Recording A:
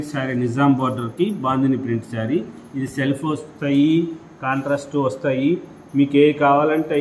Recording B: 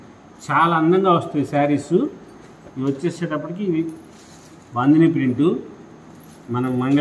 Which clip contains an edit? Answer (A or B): B